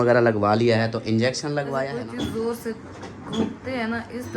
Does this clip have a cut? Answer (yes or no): yes